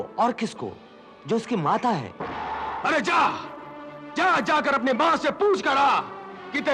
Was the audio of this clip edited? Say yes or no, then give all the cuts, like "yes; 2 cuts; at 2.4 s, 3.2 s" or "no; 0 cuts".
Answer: yes; 1 cut; at 2.7 s